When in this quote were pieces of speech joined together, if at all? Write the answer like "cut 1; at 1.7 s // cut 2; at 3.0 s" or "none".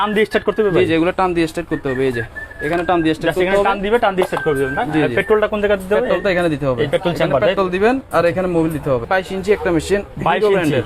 cut 1; at 9.1 s